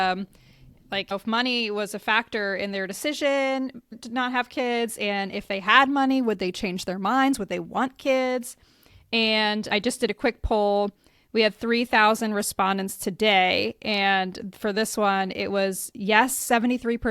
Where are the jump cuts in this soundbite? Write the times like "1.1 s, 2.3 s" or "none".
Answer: 1.1 s, 4.0 s

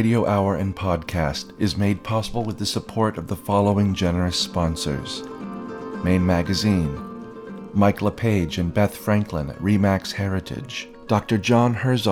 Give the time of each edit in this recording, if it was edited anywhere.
none

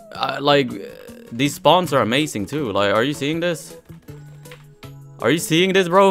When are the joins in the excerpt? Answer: none

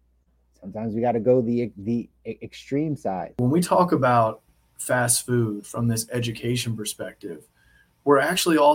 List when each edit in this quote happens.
3.4 s

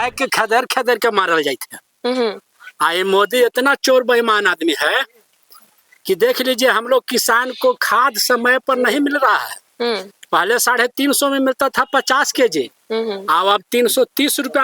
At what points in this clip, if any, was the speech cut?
none

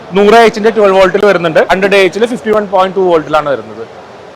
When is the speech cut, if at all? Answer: 1.7 s

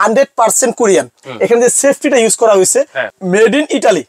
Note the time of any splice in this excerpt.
1.2 s, 3.0 s

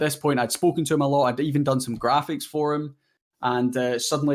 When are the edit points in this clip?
none

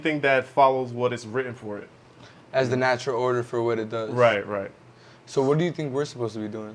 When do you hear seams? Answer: none

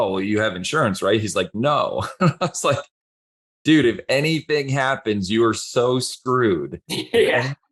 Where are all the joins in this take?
none

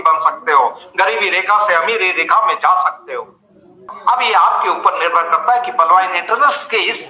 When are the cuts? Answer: 3.9 s

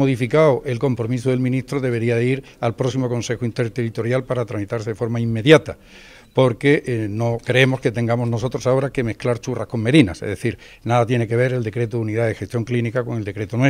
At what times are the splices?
none

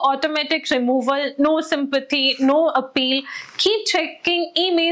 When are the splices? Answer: none

